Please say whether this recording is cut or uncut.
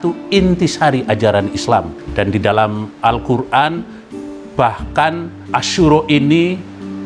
cut